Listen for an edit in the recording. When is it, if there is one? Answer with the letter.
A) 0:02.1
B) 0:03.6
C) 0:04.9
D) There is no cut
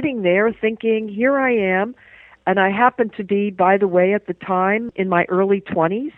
C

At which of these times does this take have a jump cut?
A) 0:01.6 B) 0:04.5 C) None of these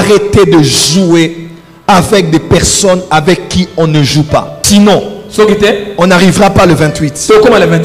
B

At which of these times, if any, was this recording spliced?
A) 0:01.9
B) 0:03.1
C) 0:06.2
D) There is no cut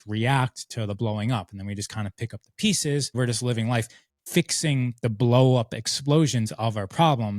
B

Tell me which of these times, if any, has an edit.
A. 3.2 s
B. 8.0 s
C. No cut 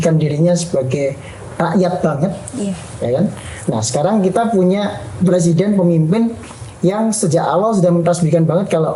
C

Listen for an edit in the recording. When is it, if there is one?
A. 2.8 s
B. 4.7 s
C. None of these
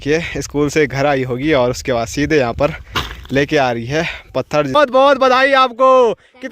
B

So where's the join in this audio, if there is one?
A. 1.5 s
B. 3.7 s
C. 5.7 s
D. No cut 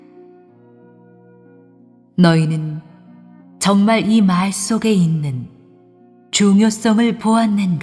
B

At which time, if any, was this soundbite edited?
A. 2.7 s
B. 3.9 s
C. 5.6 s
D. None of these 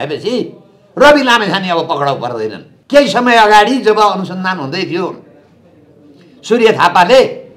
A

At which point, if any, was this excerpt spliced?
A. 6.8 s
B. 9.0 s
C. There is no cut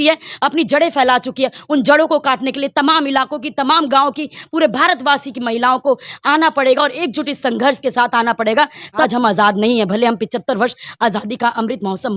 B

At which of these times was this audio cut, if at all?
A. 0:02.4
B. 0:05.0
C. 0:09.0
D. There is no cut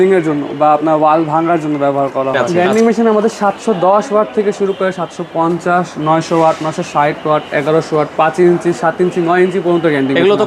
A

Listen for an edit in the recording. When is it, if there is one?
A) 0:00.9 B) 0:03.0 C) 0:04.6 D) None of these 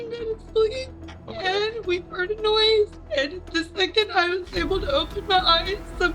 B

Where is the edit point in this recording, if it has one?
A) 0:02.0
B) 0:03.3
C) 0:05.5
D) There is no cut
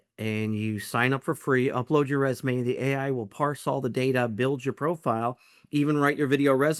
D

